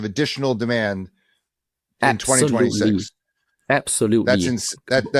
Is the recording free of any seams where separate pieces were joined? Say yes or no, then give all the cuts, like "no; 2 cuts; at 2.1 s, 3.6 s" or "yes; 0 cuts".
yes; 0 cuts